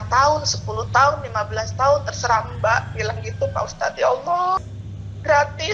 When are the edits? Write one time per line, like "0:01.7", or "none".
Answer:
0:04.6